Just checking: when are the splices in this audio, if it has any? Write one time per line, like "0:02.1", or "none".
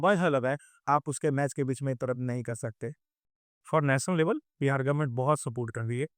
0:03.5

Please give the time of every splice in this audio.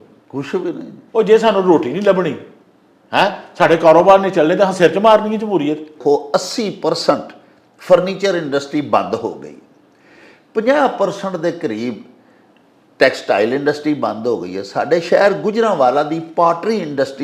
0:06.0

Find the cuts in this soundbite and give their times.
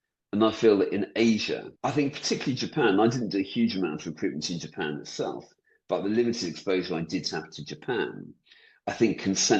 0:01.7

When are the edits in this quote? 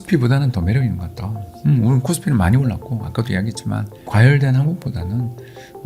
0:04.0

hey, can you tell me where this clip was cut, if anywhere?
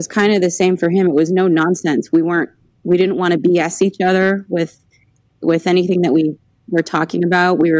none

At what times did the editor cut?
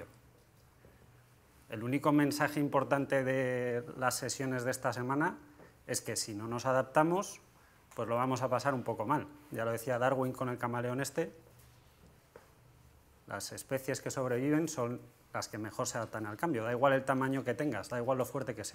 none

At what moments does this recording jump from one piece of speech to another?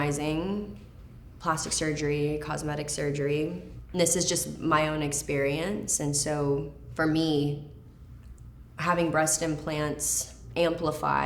0:06.8

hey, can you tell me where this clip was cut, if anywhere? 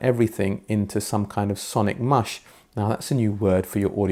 none

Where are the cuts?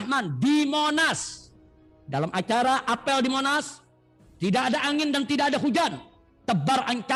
none

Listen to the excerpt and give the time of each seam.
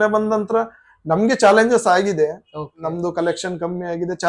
none

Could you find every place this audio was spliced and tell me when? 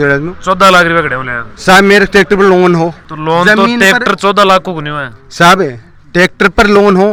none

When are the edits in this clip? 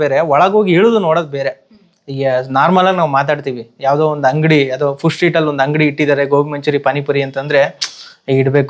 none

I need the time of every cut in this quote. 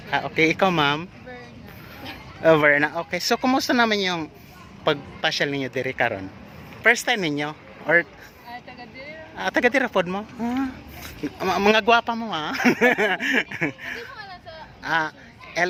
none

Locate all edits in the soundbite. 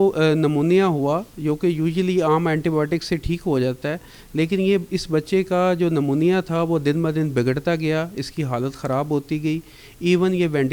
none

